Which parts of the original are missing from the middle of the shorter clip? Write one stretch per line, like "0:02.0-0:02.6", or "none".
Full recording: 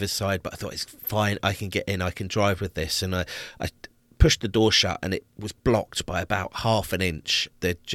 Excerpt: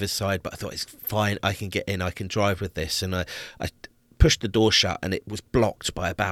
0:05.3-0:05.5